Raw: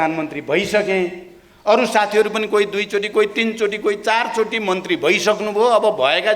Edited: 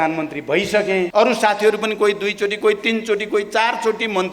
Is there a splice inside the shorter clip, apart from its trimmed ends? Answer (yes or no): yes